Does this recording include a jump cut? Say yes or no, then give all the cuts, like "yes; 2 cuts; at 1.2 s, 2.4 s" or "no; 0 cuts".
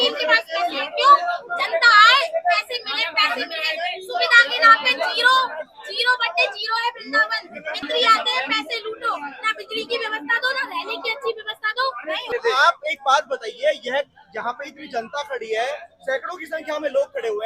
no; 0 cuts